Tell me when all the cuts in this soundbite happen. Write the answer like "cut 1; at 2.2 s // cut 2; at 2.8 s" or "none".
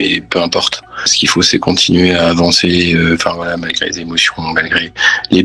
cut 1; at 1.2 s